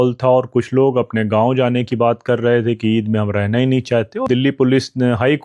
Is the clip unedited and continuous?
no; 1 cut; at 4.3 s

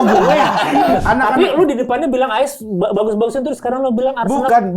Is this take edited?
yes; 1 cut; at 1.0 s

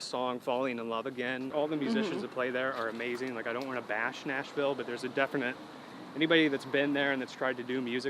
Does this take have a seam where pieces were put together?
yes; 1 cut; at 1.5 s

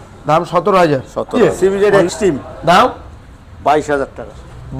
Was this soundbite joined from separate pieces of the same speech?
yes; 1 cut; at 1.4 s

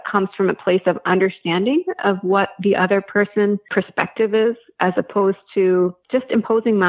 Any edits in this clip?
yes; 2 cuts; at 3.6 s, 6.0 s

